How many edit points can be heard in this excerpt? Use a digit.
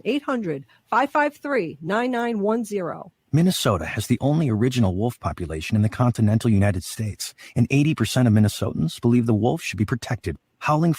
1